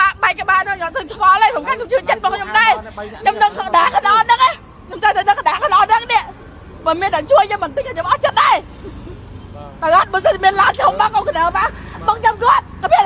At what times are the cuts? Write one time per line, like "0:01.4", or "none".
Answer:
none